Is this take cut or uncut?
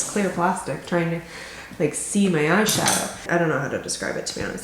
cut